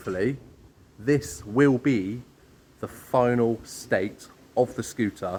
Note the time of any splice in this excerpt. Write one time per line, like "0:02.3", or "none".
none